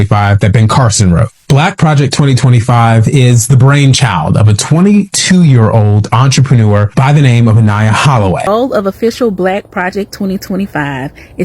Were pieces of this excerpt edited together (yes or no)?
yes